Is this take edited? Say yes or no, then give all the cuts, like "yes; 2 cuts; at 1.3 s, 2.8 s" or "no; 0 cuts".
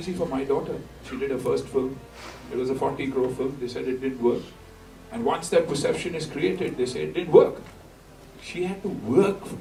no; 0 cuts